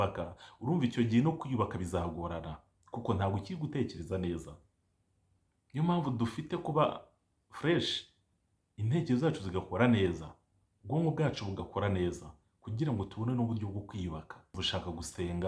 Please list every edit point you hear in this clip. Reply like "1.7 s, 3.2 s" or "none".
14.4 s